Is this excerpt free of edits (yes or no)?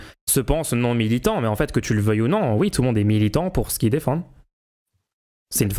yes